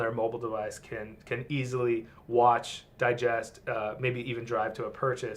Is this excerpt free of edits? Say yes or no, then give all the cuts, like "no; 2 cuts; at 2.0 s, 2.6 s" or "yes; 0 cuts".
yes; 0 cuts